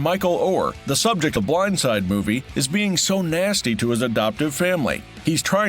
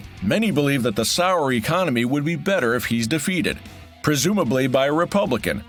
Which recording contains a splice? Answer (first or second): first